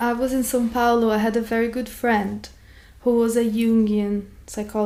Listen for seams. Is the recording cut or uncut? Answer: uncut